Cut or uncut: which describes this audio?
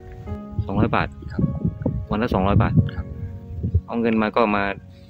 uncut